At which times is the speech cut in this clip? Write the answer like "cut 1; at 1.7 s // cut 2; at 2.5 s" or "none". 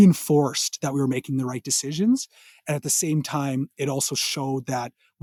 none